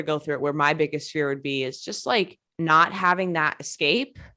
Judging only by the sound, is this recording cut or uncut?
cut